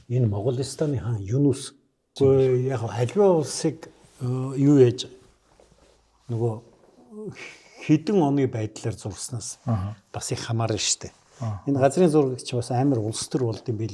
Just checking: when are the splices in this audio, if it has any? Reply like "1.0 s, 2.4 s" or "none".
2.0 s